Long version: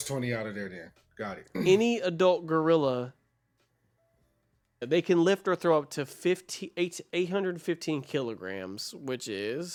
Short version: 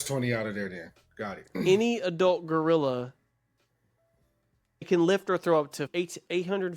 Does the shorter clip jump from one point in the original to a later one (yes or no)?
yes